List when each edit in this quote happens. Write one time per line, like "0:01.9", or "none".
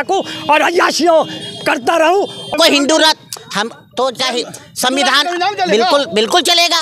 0:02.5